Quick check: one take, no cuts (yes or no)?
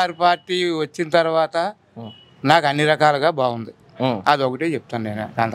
yes